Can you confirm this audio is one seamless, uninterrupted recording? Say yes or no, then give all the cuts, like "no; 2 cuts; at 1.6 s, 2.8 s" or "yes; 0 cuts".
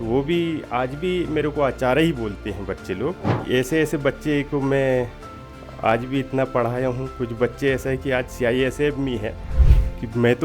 no; 2 cuts; at 3.4 s, 9.6 s